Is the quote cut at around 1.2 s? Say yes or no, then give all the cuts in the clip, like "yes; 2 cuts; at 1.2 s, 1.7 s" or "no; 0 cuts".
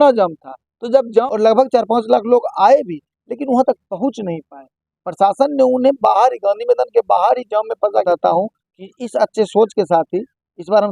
yes; 2 cuts; at 1.2 s, 8.0 s